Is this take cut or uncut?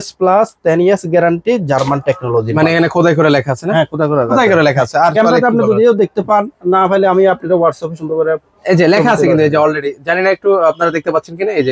uncut